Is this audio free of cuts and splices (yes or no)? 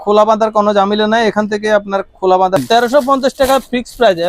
no